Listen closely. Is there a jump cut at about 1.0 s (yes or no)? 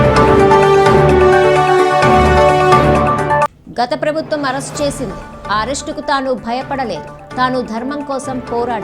yes